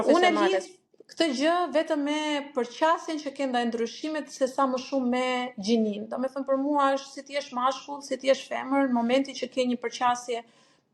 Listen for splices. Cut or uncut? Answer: uncut